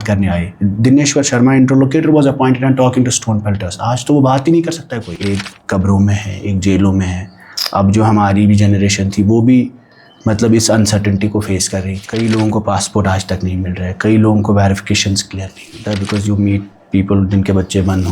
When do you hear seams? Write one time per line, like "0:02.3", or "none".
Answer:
0:05.2
0:12.0
0:15.8